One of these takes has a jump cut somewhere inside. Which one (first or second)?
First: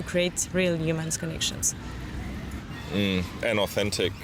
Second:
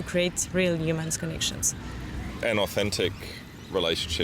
second